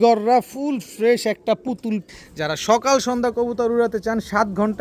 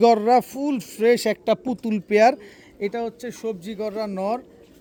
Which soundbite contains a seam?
first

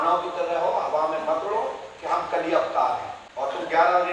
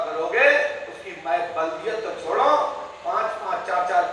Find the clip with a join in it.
first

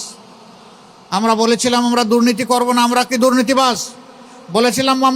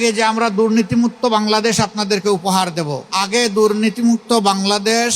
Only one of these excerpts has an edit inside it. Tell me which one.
second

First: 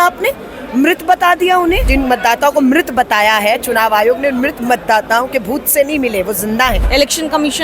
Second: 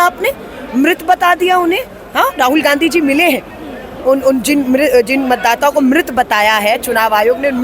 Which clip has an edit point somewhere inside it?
first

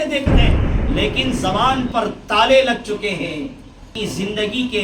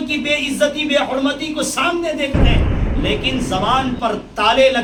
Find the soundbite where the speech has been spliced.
first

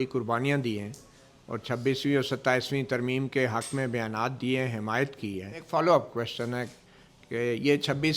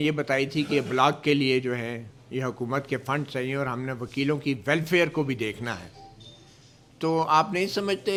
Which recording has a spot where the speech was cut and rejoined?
first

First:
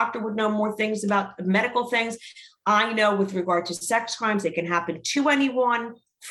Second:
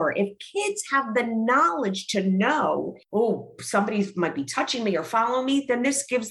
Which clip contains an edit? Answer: second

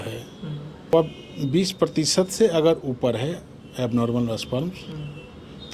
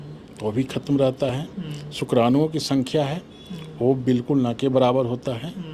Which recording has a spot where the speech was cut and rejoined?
first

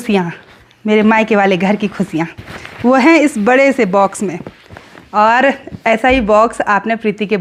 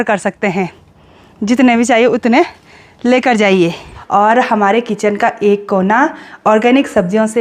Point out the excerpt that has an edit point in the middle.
second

